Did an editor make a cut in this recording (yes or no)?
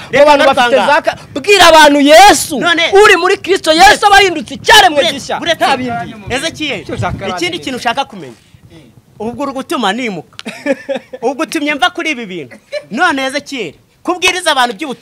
no